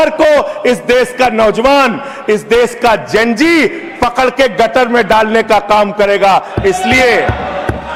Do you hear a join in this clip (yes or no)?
no